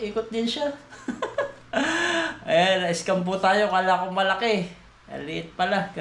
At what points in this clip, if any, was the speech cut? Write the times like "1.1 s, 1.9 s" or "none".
none